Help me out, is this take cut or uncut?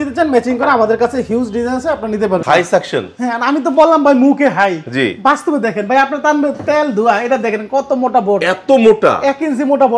cut